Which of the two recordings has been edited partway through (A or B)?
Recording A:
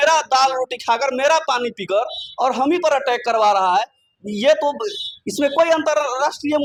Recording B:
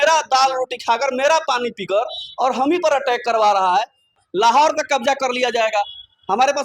B